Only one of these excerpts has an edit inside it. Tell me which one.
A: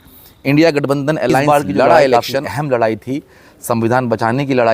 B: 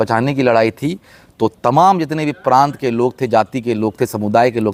A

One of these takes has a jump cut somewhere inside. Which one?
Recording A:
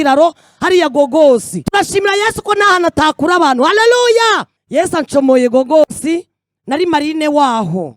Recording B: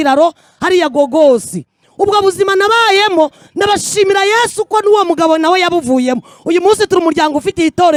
A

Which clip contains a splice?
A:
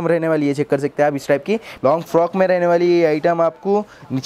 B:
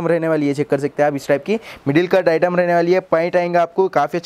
A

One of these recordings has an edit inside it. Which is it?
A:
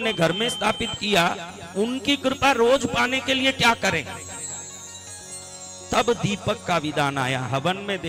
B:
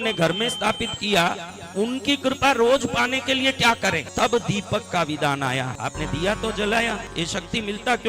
B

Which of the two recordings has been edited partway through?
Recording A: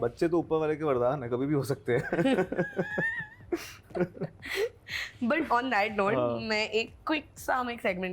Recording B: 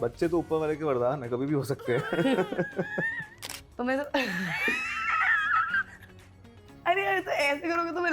B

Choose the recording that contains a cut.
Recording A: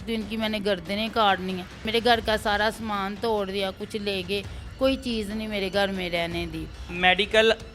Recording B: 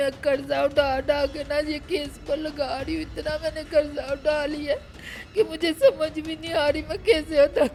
A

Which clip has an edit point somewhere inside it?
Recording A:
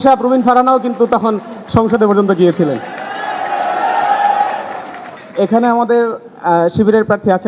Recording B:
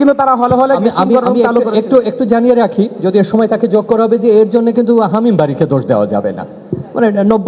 A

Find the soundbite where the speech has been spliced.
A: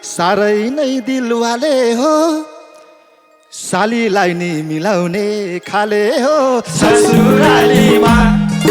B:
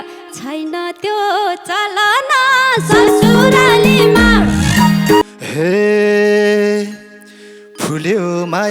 B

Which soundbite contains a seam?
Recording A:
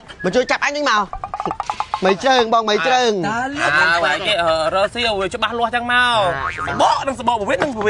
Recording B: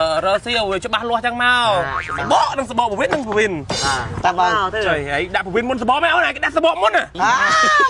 A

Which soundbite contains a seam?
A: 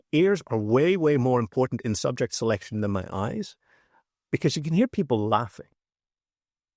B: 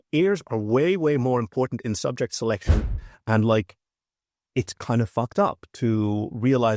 B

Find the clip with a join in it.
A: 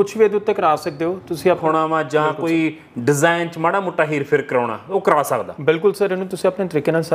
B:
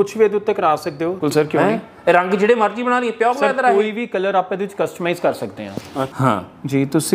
B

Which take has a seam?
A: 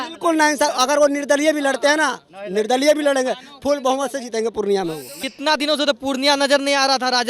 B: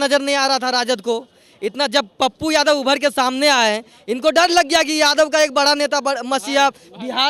A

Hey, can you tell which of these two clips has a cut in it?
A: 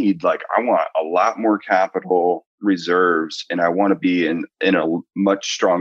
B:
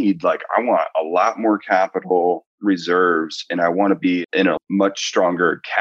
B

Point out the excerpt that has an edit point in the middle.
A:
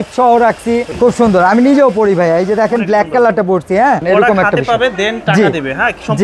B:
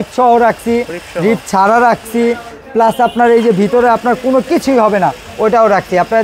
A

